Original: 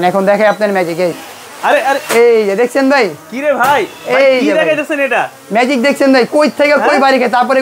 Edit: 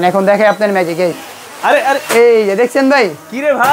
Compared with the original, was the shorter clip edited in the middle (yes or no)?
no